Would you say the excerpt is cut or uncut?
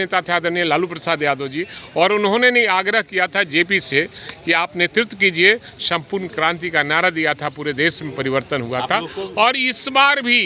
uncut